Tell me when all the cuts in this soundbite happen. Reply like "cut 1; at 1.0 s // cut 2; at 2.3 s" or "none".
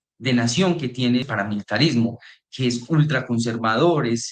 cut 1; at 1.2 s